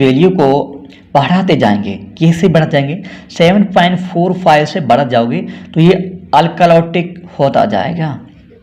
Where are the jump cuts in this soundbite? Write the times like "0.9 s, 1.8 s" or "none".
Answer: none